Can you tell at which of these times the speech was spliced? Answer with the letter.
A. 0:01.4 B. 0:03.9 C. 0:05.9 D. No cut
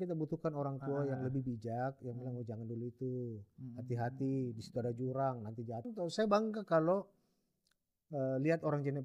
C